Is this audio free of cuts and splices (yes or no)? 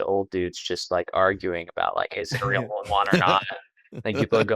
yes